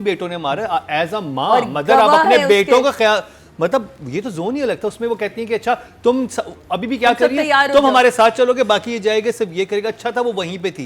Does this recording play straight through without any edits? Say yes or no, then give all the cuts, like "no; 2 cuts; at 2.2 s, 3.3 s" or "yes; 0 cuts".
yes; 0 cuts